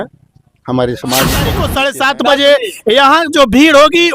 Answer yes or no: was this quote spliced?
yes